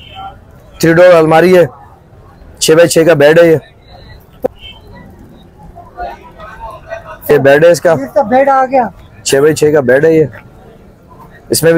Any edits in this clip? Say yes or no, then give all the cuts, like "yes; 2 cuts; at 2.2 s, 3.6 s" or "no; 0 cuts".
yes; 2 cuts; at 4.2 s, 7.3 s